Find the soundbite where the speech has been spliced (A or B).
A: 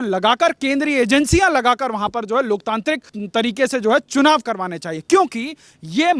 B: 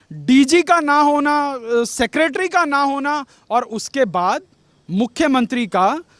A